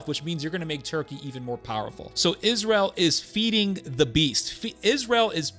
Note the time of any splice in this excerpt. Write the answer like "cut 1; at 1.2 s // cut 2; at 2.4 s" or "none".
cut 1; at 2.0 s